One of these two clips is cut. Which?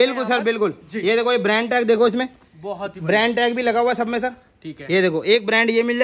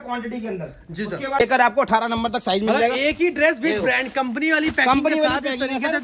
second; 1 cut; at 1.4 s

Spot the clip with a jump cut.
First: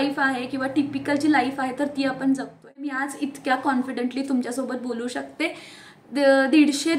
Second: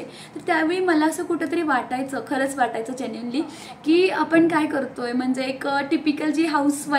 first; 1 cut; at 2.9 s

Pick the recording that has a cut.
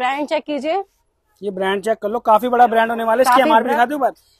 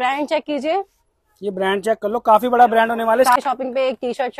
second; 1 cut; at 3.4 s

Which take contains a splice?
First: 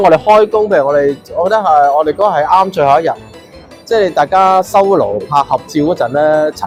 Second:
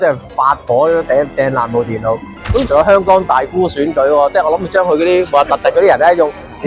second; 1 cut; at 2.6 s

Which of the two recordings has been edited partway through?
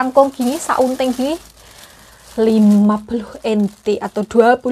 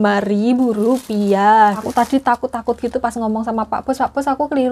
second; 1 cut; at 1.8 s

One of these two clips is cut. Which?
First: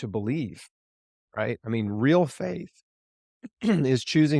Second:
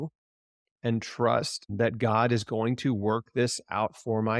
second; 1 cut; at 1.7 s

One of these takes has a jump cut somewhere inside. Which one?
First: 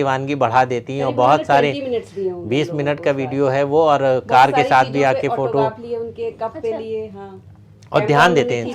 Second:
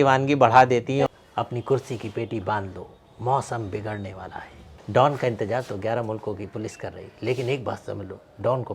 second; 2 cuts; at 1.1 s, 4.6 s

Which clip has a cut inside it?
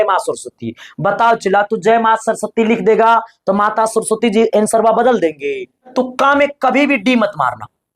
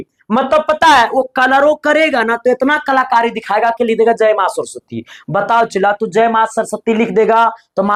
first; 1 cut; at 5.9 s

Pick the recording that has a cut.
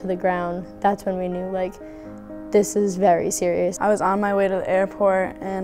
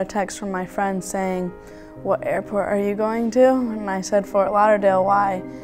first; 1 cut; at 3.7 s

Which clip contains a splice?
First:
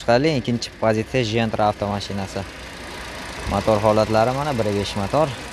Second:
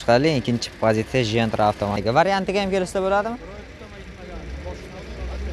second; 1 cut; at 2.0 s

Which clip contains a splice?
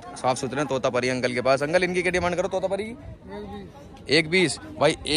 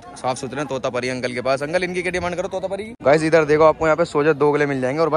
second; 1 cut; at 2.9 s

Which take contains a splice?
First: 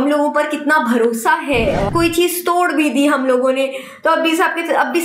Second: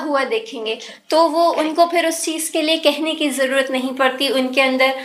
first; 1 cut; at 1.9 s

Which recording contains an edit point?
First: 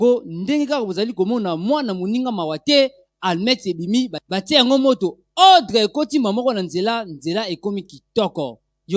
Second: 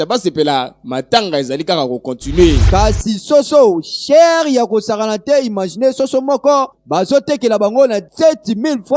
second; 1 cut; at 2.7 s

